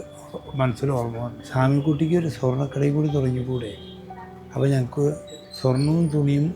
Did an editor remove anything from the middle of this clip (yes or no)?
yes